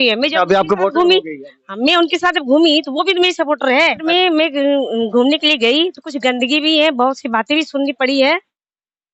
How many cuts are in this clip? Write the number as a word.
one